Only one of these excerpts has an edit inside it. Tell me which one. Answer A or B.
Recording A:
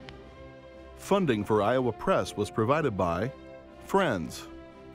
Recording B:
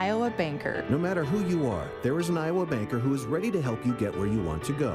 A